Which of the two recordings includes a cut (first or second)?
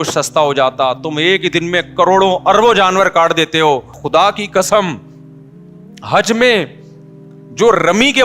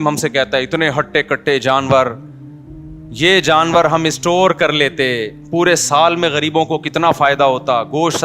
first